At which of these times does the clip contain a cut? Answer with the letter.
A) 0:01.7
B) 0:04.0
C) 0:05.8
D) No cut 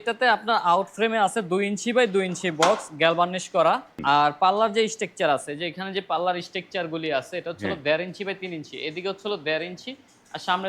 B